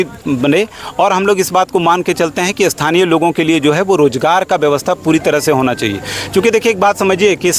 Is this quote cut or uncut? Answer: uncut